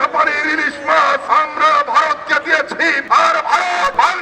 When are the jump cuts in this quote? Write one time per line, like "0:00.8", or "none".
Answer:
0:01.2
0:03.0